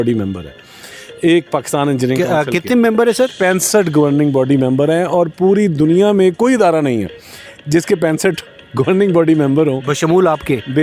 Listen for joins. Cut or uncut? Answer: uncut